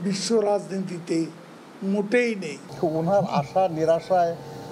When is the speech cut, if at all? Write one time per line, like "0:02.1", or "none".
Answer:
0:02.9